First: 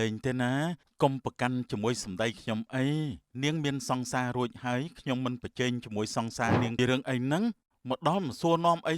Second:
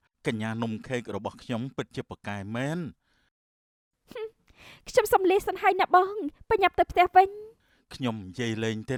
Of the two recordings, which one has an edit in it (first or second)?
first